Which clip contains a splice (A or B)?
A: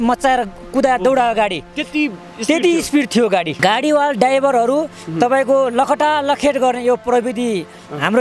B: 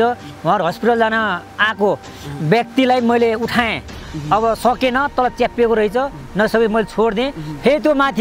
A